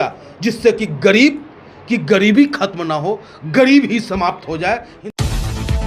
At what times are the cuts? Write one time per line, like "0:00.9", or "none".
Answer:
0:04.9